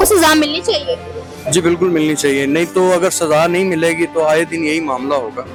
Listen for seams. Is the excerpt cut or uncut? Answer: uncut